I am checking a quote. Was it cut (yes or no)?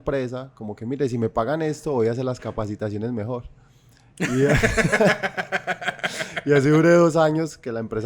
no